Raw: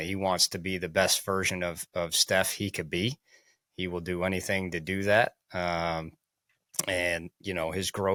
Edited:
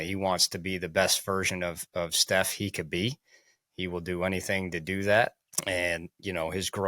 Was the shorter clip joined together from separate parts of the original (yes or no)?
yes